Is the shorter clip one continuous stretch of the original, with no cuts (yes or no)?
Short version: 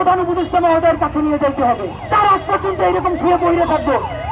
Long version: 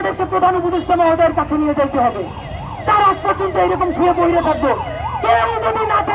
no